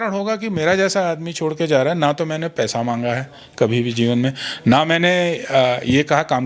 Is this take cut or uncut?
uncut